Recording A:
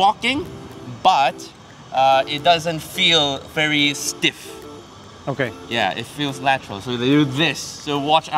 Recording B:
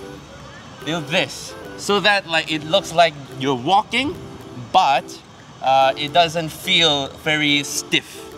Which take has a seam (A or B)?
B